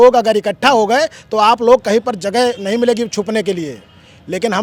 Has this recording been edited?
no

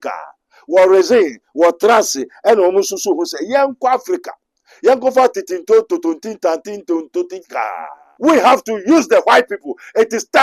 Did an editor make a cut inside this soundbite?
yes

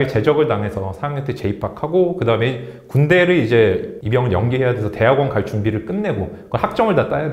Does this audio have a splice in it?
yes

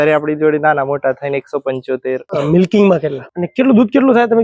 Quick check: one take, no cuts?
no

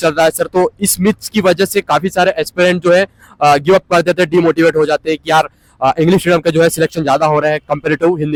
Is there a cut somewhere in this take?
no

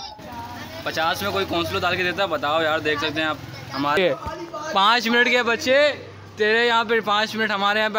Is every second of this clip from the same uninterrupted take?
no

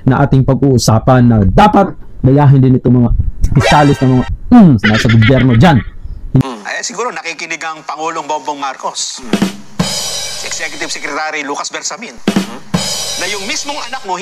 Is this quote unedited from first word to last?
no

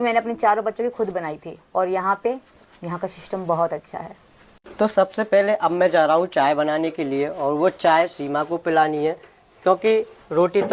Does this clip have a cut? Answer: no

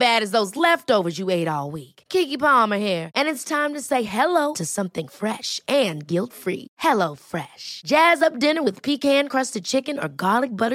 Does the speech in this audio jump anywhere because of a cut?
no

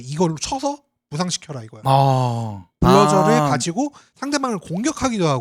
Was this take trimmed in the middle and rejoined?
yes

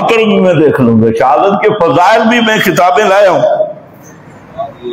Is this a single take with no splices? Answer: yes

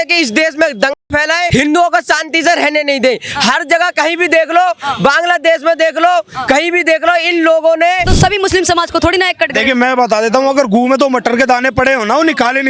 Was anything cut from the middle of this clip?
yes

